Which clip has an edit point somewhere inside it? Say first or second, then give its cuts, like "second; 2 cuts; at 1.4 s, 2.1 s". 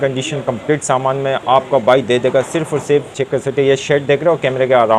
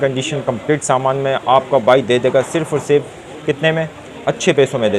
first; 1 cut; at 3.3 s